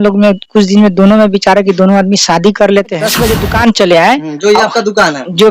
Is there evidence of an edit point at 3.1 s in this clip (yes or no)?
yes